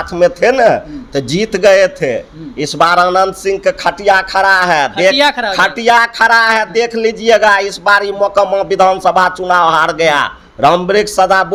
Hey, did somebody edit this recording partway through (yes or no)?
no